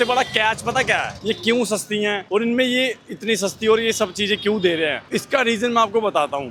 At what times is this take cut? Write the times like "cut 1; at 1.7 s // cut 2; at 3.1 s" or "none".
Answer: none